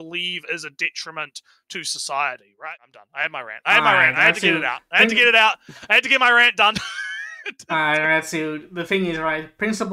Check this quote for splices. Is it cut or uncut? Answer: cut